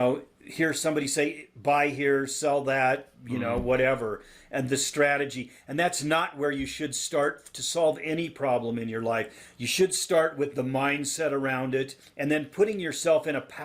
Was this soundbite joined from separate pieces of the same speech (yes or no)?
yes